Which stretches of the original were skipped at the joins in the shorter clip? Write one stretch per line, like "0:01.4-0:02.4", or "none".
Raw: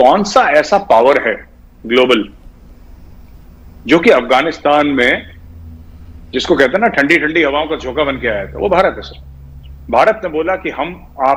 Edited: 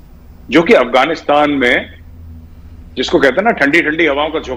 none